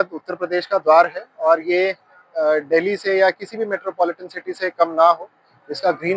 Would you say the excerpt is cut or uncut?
uncut